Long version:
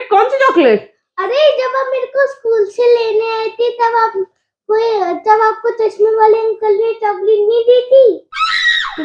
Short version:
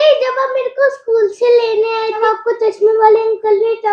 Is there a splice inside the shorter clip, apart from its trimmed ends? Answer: yes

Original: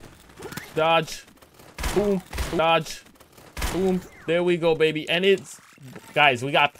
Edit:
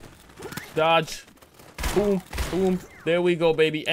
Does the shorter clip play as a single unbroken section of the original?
no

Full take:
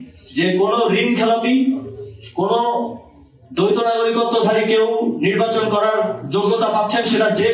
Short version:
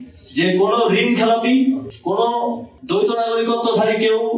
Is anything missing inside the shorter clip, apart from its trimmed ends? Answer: yes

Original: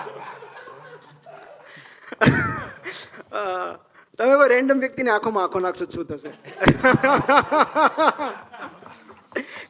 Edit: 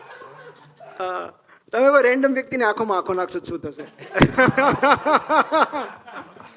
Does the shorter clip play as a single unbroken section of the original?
no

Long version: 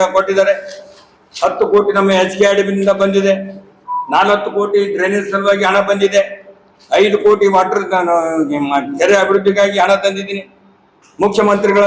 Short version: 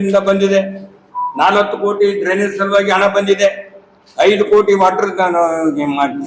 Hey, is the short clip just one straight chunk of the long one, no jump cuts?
yes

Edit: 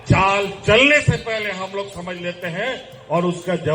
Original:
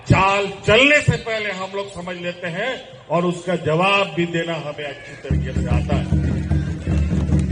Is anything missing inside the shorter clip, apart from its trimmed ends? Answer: no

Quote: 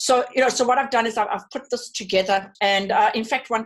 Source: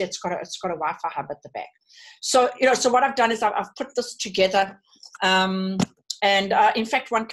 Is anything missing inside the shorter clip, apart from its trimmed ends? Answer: yes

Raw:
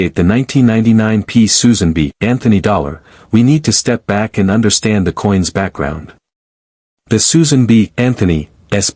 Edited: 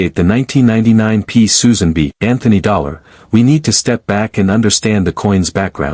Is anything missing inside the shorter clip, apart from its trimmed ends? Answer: no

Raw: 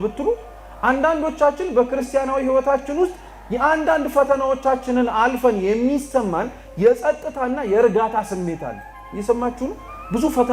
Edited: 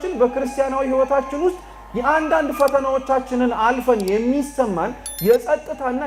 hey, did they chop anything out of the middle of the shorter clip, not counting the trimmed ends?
no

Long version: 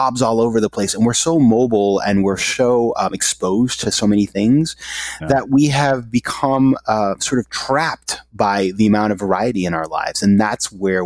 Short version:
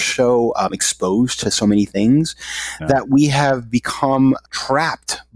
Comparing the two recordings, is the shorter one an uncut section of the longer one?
no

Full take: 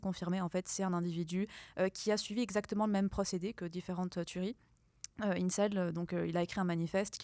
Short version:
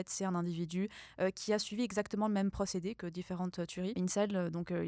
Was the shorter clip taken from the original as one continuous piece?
no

